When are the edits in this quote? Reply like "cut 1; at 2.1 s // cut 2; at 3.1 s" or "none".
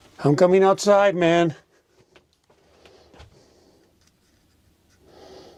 none